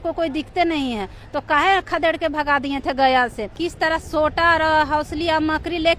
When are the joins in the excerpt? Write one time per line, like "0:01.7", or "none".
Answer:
0:03.5